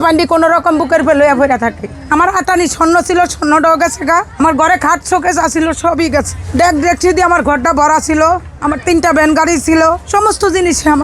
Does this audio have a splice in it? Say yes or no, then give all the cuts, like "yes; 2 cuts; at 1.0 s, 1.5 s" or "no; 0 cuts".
yes; 5 cuts; at 1.9 s, 4.3 s, 6.4 s, 8.5 s, 10.0 s